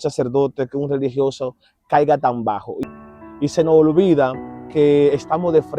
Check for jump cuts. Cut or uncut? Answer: cut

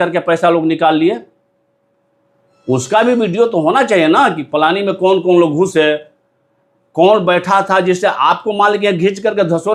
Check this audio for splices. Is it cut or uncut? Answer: uncut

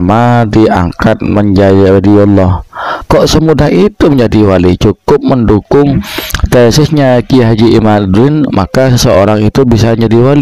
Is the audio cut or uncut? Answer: uncut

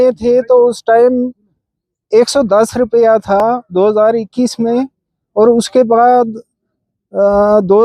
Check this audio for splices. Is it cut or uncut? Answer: uncut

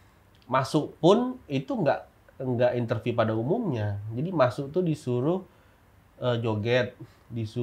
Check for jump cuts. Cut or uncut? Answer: uncut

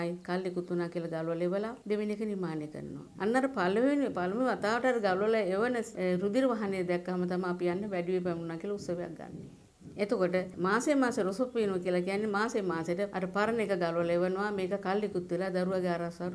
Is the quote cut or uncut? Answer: uncut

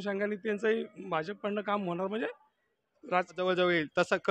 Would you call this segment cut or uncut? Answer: cut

